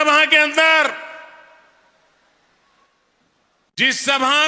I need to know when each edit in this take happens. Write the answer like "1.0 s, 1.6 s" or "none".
none